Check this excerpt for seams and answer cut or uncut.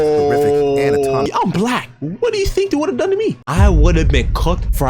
cut